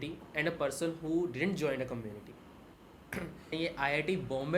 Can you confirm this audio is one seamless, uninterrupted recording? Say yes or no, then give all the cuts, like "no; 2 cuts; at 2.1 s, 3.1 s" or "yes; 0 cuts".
no; 1 cut; at 3.5 s